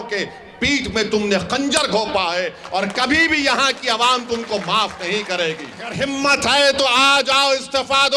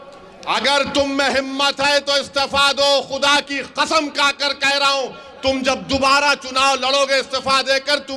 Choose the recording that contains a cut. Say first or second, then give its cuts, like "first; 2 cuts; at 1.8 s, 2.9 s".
first; 1 cut; at 5.9 s